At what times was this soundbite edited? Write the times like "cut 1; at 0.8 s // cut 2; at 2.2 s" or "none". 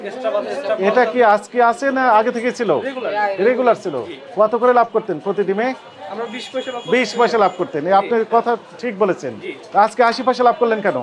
none